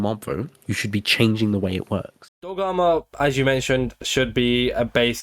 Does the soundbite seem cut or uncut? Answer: cut